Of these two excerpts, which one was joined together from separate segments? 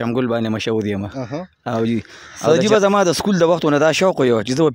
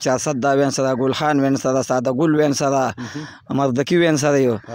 first; 1 cut; at 2.5 s

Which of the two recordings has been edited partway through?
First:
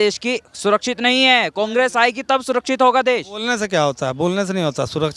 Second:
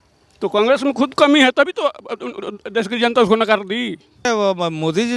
second; 1 cut; at 4.2 s

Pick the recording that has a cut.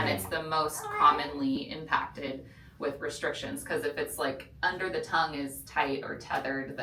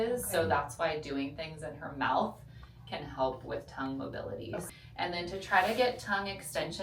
second; 1 cut; at 4.6 s

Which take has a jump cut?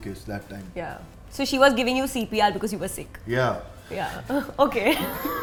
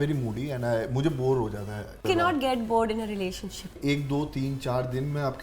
second; 2 cuts; at 2.0 s, 3.7 s

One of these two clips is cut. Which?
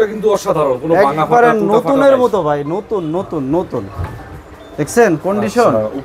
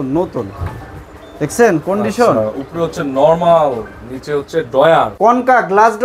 second; 1 cut; at 5.1 s

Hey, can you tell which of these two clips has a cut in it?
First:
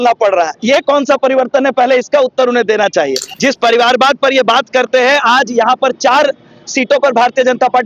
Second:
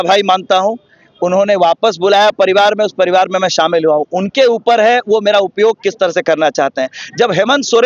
first; 1 cut; at 3.2 s

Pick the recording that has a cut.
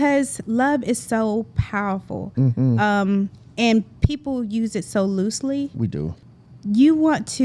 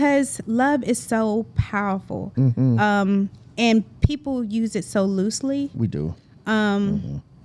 first; 1 cut; at 6.3 s

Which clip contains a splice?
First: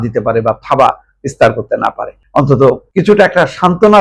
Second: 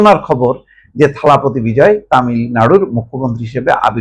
first; 2 cuts; at 2.1 s, 2.8 s

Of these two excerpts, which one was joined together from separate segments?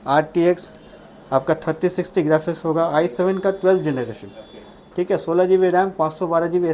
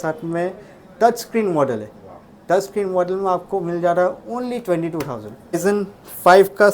second; 1 cut; at 5.6 s

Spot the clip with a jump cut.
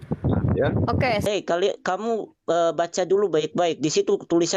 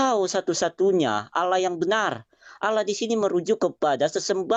first; 1 cut; at 1.2 s

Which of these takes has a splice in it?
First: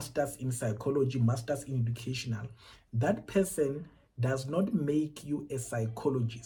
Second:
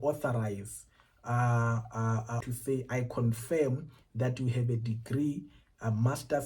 second; 1 cut; at 2.4 s

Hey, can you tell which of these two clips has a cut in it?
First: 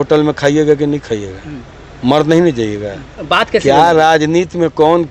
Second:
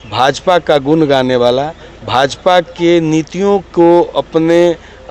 first; 1 cut; at 3.1 s

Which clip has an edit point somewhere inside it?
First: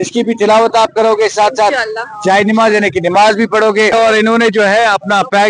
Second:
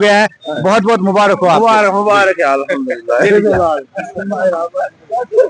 first; 1 cut; at 3.9 s

